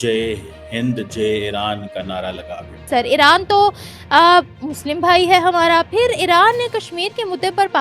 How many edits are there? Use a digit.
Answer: 1